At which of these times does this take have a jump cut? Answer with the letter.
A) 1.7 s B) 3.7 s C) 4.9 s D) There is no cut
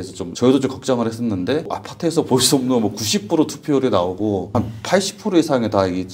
D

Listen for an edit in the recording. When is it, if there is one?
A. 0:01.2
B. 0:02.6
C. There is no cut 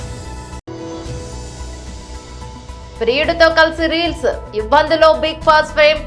B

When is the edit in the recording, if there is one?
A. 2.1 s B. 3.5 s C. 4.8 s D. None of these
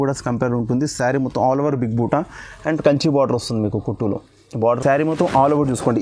C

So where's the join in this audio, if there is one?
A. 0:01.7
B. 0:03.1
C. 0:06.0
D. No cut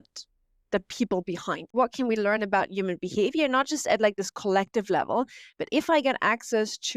A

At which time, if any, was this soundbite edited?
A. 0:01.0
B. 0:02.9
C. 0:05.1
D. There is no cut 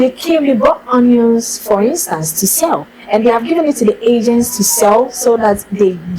B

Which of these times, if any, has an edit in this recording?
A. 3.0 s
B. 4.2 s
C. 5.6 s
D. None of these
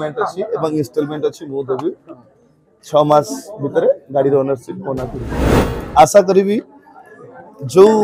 C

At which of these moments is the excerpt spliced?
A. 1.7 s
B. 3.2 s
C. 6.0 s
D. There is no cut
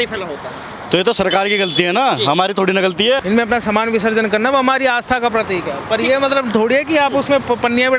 B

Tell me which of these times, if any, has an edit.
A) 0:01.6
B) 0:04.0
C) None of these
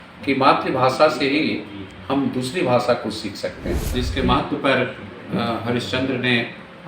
B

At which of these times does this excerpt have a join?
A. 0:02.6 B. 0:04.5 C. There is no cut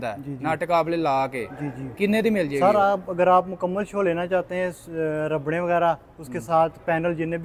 A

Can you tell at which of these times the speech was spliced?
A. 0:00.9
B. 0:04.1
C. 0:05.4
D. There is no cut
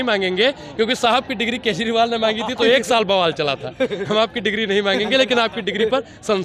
D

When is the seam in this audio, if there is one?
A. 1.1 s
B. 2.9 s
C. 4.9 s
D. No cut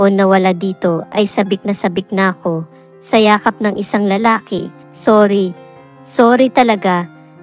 C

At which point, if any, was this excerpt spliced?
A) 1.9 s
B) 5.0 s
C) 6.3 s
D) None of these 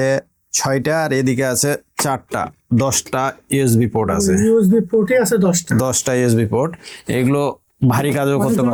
D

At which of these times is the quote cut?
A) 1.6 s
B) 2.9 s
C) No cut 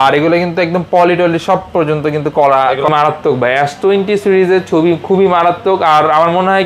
B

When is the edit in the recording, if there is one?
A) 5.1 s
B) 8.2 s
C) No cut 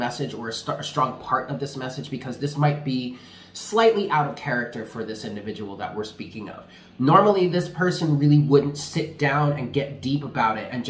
C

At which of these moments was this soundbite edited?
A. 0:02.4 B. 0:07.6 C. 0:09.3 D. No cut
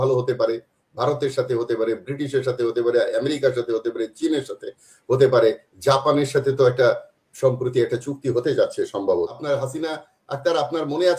C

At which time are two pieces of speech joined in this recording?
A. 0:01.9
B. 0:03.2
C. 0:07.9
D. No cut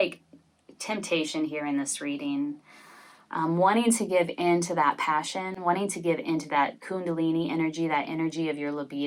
D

